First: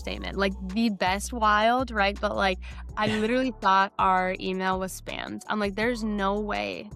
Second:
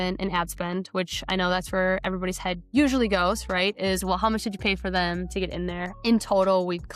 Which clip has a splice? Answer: second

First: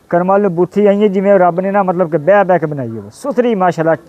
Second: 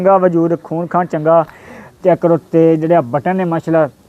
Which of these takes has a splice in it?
second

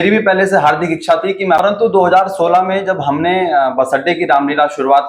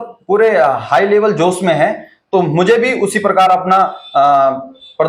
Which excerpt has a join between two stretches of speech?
first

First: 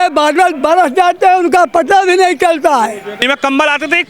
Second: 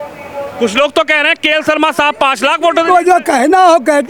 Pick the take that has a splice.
first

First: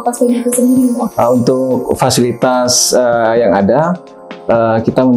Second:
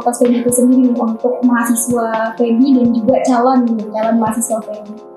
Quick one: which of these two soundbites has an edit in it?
first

